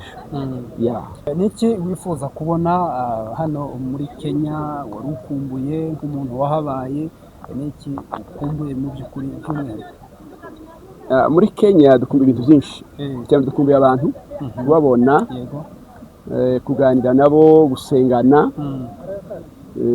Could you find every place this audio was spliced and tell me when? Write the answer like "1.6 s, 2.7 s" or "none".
1.3 s